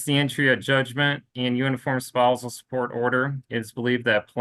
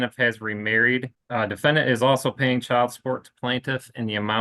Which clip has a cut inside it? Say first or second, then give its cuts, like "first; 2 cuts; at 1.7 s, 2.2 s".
second; 1 cut; at 1.2 s